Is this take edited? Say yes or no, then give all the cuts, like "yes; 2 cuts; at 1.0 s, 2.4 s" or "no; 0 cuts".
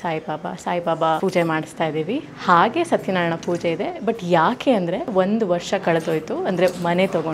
yes; 2 cuts; at 1.2 s, 5.1 s